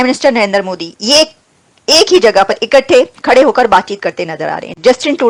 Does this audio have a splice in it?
no; 0 cuts

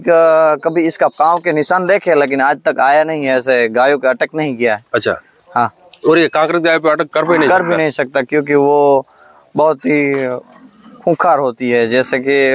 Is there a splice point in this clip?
yes; 1 cut; at 7.1 s

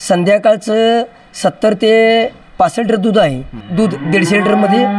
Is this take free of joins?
no; 1 cut; at 3.6 s

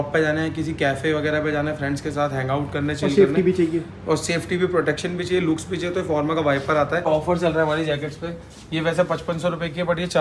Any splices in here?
yes; 1 cut; at 7.1 s

